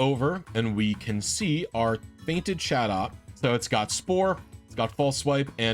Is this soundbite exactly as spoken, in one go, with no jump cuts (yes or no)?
no